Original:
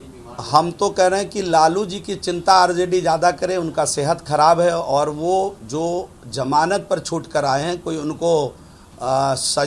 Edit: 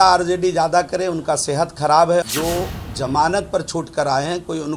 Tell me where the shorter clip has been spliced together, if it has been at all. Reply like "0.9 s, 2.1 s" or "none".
2.3 s